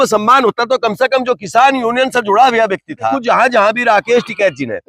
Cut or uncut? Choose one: cut